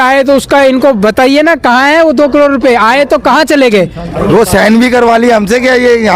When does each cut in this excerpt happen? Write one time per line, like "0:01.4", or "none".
0:04.3